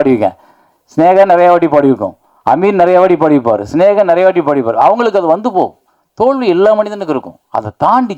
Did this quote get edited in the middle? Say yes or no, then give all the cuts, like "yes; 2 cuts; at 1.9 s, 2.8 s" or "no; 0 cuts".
no; 0 cuts